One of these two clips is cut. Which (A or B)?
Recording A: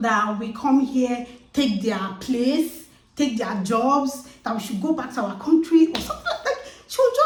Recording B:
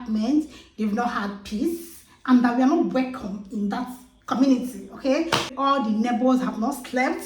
B